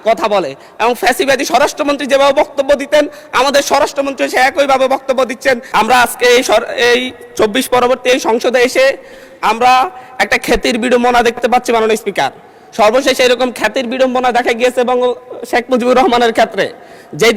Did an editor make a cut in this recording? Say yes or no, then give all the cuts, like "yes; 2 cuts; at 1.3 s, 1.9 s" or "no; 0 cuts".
yes; 1 cut; at 5.6 s